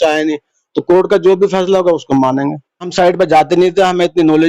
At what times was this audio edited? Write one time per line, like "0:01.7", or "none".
0:02.9